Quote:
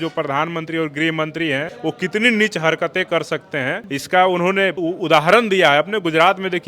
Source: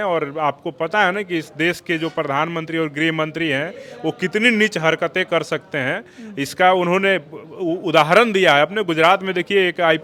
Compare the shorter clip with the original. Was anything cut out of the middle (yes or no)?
yes